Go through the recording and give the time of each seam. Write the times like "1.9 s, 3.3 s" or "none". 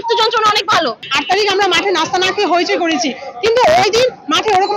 1.0 s